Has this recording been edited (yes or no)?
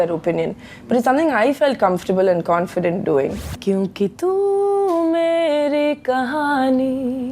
yes